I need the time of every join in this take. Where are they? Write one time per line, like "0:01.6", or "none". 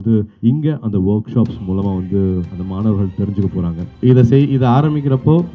0:03.9